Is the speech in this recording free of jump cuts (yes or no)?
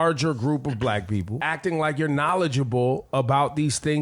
no